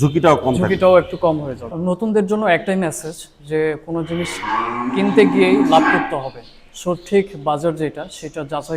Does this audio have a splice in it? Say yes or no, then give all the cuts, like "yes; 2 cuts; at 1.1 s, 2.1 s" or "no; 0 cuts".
yes; 1 cut; at 1.7 s